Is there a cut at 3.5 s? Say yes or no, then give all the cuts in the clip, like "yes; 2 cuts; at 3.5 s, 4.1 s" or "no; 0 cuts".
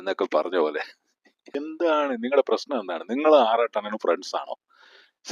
no; 1 cut; at 1.5 s